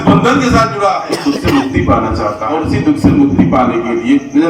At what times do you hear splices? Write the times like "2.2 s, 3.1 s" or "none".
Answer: 1.1 s, 2.5 s